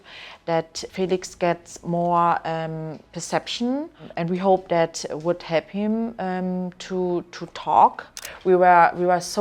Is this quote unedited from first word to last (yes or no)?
no